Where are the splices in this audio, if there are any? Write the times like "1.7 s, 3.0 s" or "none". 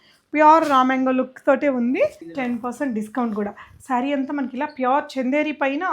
2.2 s